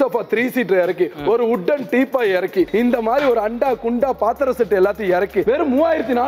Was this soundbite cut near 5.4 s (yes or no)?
yes